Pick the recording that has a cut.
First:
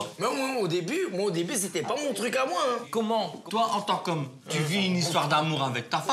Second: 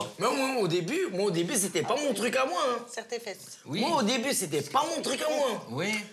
first; 1 cut; at 2.9 s

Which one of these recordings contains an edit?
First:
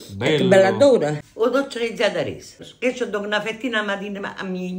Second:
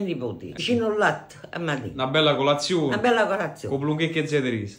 first; 2 cuts; at 1.2 s, 2.6 s

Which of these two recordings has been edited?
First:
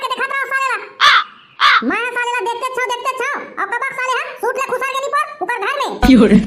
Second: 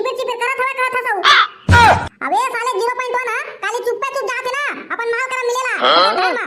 second; 1 cut; at 1.6 s

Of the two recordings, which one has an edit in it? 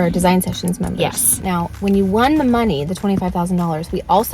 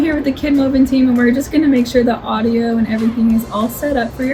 first; 1 cut; at 1.4 s

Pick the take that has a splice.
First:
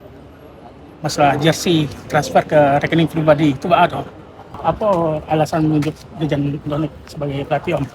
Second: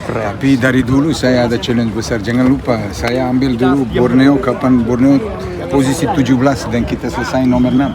first; 1 cut; at 4.6 s

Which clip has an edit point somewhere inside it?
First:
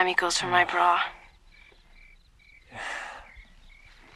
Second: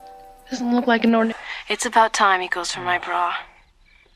second; 1 cut; at 1.3 s

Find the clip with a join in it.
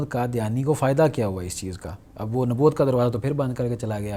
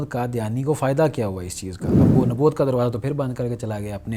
second; 1 cut; at 2.1 s

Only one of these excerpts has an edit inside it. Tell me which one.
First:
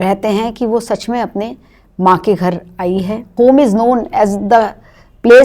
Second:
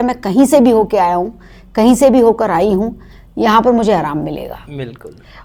first; 1 cut; at 3.3 s

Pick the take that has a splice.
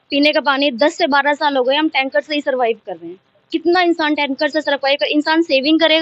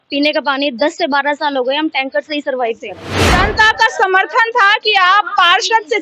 second; 1 cut; at 3.3 s

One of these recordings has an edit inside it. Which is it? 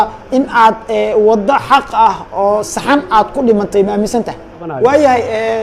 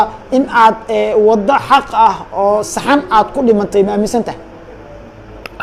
first; 1 cut; at 4.7 s

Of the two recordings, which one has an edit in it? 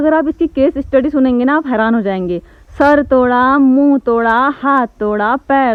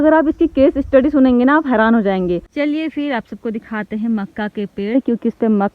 second; 1 cut; at 2.5 s

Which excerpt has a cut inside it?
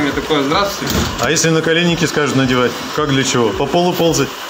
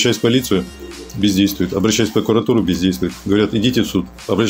first; 1 cut; at 2.9 s

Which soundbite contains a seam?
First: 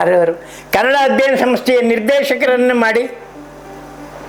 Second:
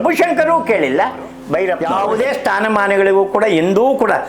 second; 1 cut; at 1.8 s

